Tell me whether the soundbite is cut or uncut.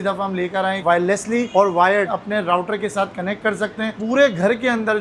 cut